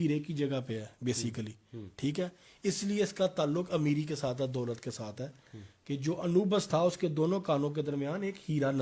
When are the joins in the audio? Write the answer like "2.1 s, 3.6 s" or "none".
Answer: none